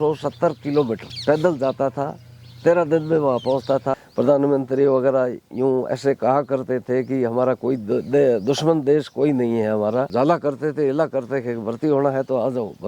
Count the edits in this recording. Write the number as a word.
three